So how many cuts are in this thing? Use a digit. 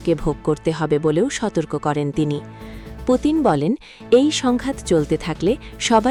0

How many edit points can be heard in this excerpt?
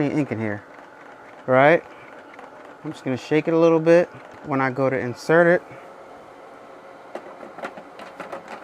1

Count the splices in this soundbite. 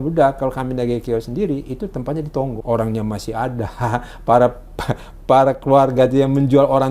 1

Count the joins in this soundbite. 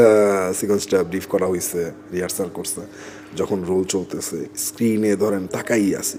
0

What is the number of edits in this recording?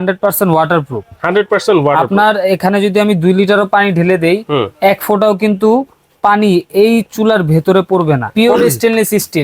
1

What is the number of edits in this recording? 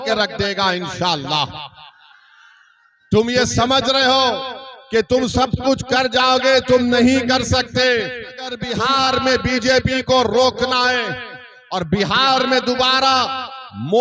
0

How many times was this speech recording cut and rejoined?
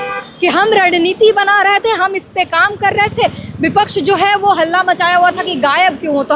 0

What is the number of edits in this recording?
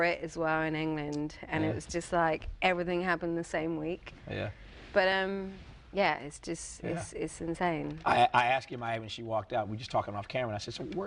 1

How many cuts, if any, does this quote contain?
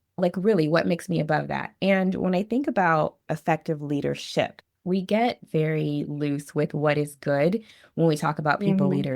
2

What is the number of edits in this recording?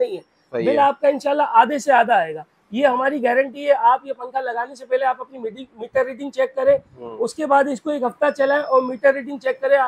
0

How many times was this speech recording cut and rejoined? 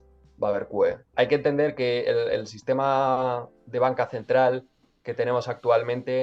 1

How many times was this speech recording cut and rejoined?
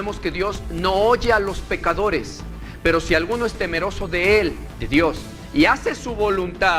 1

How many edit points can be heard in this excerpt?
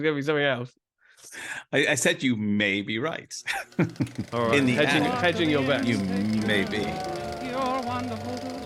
1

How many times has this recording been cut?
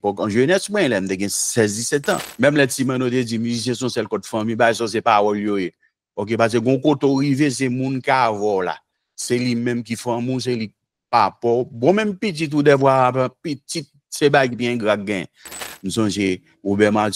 2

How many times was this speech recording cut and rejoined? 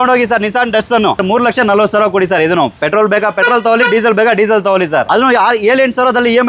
2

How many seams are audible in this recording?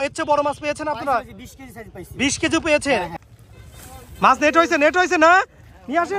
1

